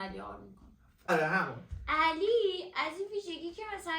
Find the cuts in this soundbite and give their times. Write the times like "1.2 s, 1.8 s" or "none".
1.1 s